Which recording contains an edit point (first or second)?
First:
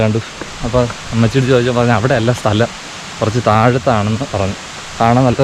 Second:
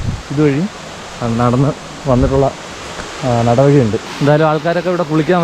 second